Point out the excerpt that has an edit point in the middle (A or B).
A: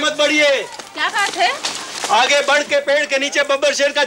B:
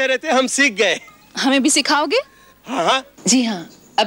B